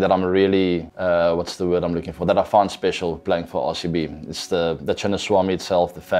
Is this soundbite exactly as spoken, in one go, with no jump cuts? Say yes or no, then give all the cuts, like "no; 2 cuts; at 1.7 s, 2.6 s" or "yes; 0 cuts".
no; 1 cut; at 0.9 s